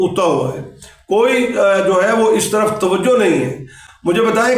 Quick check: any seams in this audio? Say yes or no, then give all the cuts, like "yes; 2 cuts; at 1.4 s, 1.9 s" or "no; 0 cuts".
no; 0 cuts